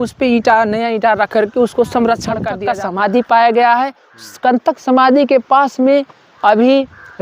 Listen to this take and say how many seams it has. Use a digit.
1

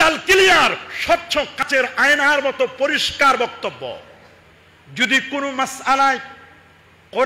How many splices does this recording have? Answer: 1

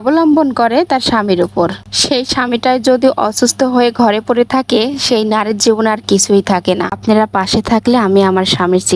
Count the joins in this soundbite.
1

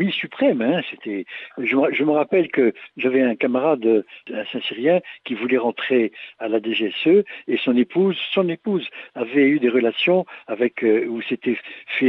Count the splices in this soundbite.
1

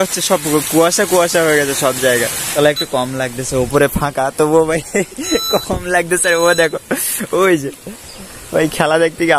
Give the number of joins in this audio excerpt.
1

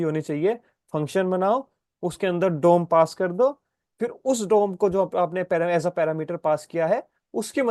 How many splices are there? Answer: 0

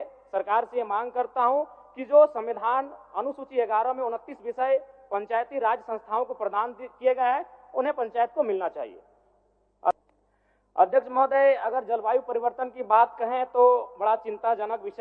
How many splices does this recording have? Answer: 1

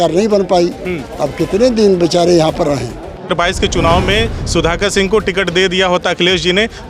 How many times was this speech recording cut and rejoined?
1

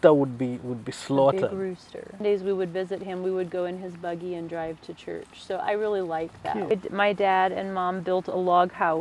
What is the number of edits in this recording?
2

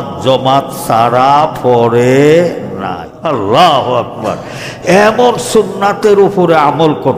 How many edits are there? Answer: 1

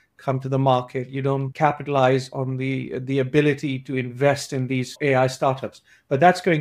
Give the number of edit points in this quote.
2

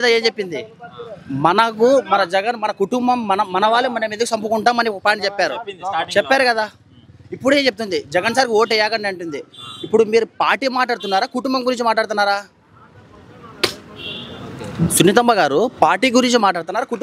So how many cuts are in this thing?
0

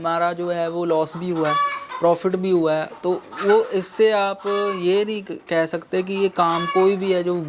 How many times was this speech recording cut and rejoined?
0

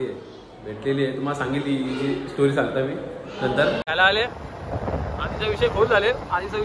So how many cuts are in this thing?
1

